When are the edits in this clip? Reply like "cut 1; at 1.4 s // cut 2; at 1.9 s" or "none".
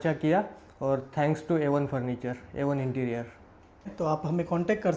cut 1; at 3.8 s